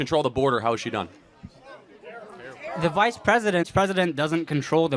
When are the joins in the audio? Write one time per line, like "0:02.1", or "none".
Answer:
0:03.7